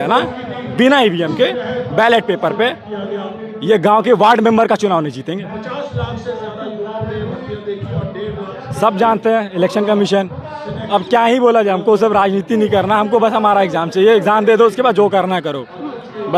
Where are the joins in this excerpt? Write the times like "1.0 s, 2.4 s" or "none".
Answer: none